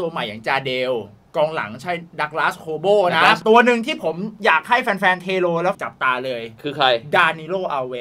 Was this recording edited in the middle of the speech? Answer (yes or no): yes